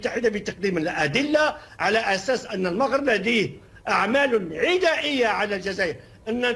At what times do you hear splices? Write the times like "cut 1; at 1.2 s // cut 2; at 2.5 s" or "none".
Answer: none